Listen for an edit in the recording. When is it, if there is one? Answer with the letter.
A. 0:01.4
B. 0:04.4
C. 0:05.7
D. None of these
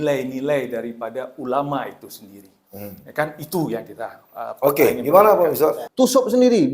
C